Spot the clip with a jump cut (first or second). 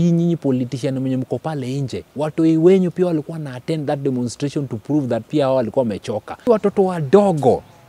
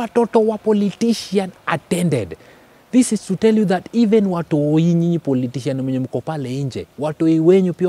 first